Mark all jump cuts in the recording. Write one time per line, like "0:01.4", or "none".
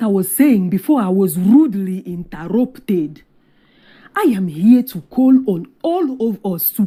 none